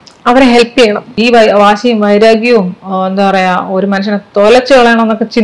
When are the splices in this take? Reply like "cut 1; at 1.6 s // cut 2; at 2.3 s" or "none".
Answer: cut 1; at 1.1 s